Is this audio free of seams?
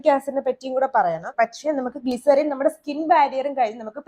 no; 1 cut; at 1.3 s

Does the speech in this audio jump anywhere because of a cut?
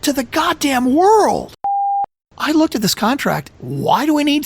yes; 2 cuts; at 1.9 s, 3.5 s

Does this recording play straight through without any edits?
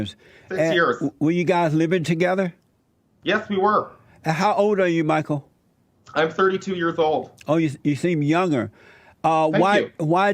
yes; 0 cuts

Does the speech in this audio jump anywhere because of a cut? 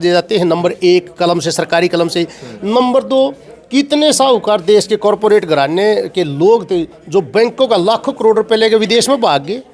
no; 0 cuts

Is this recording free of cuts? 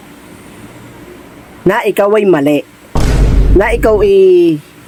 yes; 0 cuts

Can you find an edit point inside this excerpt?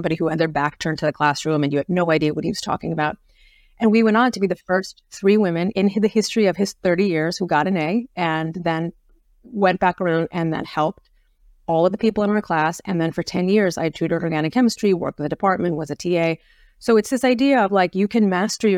yes; 1 cut; at 5.7 s

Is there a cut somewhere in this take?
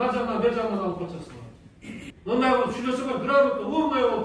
yes; 1 cut; at 2.1 s

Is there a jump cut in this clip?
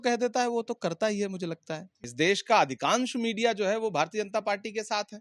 yes; 1 cut; at 1.9 s

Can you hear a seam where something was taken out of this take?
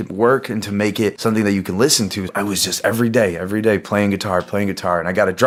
no; 0 cuts

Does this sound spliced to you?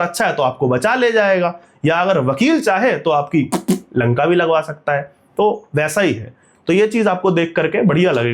no; 0 cuts

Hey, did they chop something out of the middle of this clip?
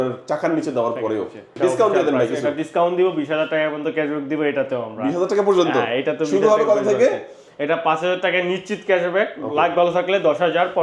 yes; 1 cut; at 1.4 s

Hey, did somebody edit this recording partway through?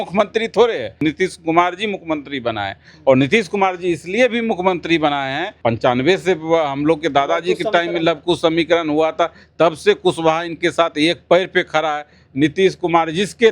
yes; 2 cuts; at 1.0 s, 5.5 s

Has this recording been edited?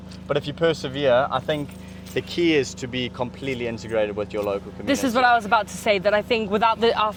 no; 0 cuts

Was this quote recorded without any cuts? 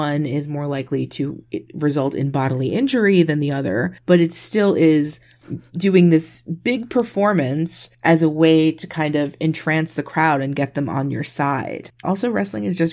no; 1 cut; at 12.0 s

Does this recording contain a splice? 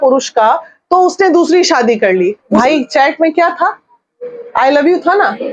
yes; 1 cut; at 2.4 s

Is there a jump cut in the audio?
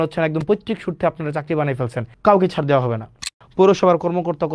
yes; 2 cuts; at 2.1 s, 3.2 s

